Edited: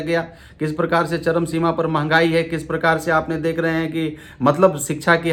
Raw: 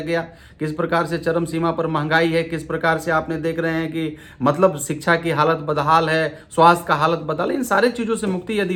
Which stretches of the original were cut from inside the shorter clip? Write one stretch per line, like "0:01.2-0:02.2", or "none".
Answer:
none